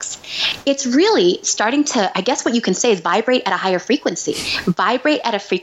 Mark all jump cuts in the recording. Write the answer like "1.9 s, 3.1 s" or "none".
none